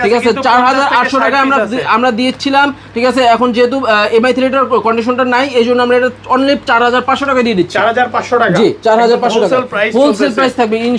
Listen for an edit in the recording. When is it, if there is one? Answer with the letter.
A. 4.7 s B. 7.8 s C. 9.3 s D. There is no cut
D